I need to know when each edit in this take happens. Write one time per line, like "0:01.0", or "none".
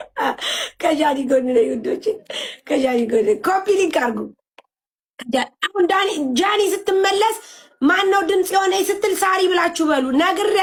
none